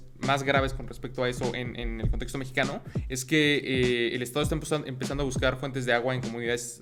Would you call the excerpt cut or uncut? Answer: uncut